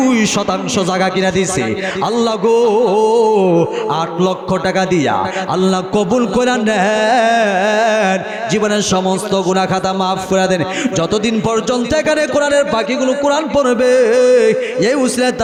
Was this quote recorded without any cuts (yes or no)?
yes